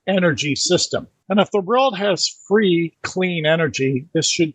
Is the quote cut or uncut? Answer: cut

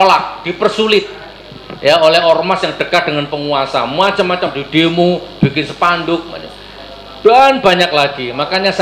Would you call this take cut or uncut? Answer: uncut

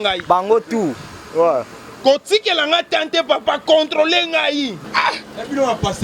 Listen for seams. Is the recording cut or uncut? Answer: cut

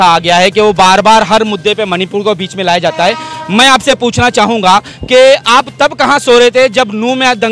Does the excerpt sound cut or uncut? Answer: uncut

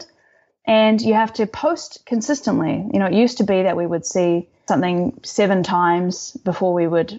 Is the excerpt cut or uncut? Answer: cut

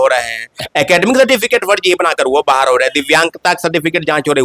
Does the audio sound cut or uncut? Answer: uncut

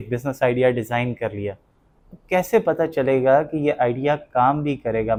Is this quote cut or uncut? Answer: uncut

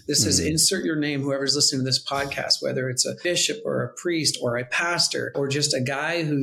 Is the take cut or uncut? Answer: cut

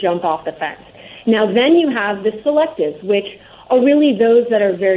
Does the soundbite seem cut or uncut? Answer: uncut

